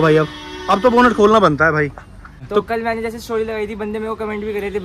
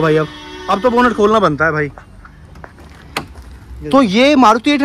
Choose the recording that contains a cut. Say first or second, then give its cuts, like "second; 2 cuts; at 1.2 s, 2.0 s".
first; 1 cut; at 2.4 s